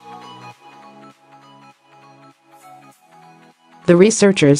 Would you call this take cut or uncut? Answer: cut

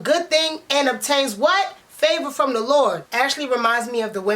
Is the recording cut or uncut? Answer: cut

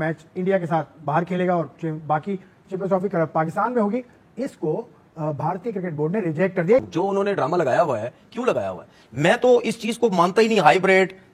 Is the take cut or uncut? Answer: cut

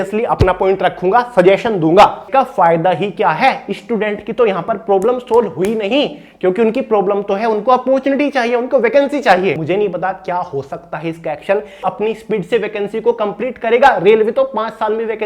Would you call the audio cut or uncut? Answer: cut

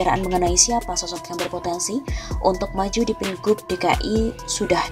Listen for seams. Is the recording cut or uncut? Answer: uncut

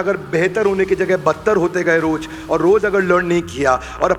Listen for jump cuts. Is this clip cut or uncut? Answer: uncut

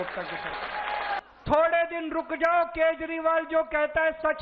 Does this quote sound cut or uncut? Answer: cut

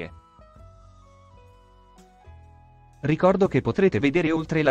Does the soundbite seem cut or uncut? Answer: uncut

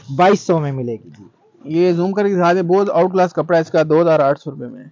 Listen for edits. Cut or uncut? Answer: uncut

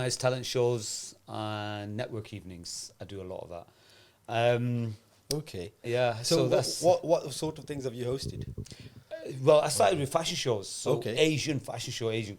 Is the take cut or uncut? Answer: uncut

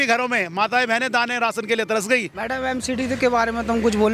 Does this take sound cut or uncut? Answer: cut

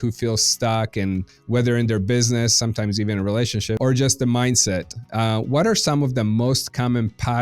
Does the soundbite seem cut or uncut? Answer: cut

